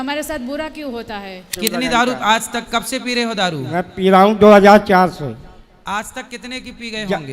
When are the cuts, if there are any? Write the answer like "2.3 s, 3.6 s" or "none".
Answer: 1.5 s